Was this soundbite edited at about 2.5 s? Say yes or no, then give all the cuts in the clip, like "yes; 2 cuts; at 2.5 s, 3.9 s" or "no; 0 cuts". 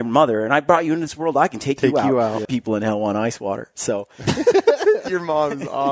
yes; 1 cut; at 2.5 s